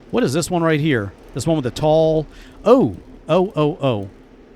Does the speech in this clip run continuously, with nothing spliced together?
yes; 0 cuts

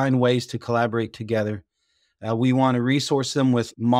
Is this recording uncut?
yes; 0 cuts

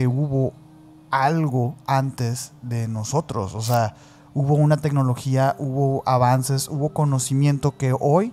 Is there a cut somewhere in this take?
no; 0 cuts

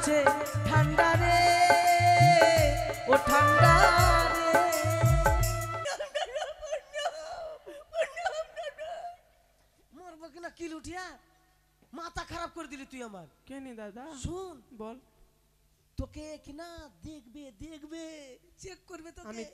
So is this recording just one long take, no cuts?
no; 1 cut; at 5.8 s

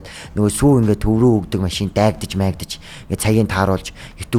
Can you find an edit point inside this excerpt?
no; 0 cuts

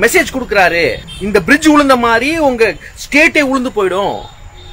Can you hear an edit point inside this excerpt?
yes; 1 cut; at 1.1 s

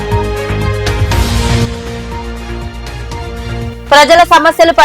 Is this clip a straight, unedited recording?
no; 1 cut; at 1.0 s

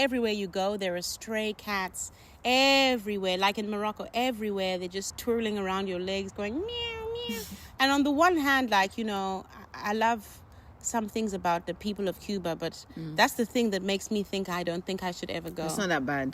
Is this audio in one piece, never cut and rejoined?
no; 1 cut; at 5.1 s

